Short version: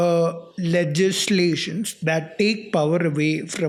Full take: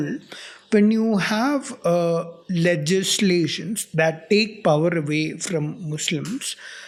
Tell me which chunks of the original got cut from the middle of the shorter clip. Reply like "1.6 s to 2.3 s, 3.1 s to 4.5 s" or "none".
none